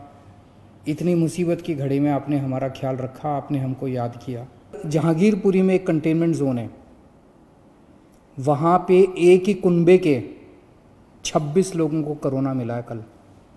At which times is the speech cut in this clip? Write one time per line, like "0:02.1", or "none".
0:04.8